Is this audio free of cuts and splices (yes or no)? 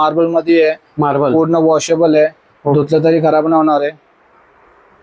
yes